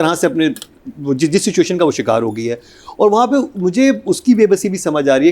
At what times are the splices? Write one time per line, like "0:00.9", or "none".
none